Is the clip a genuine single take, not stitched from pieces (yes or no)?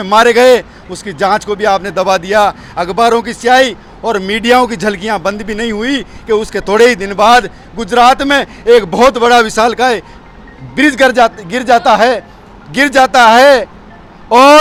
yes